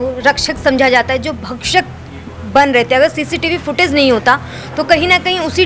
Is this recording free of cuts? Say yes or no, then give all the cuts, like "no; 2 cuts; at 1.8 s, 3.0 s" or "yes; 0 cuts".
yes; 0 cuts